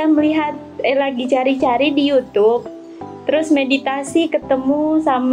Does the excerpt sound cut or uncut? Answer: uncut